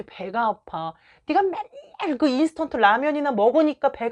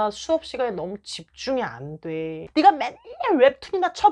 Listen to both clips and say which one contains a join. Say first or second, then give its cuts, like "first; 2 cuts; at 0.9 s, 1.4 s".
second; 1 cut; at 2.4 s